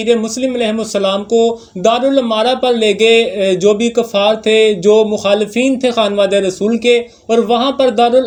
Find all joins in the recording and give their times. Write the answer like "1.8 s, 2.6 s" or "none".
none